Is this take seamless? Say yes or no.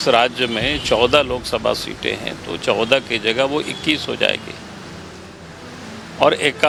yes